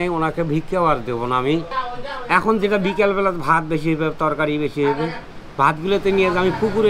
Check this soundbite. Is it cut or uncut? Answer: cut